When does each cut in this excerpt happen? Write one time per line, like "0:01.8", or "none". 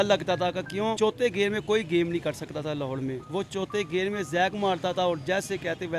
0:01.0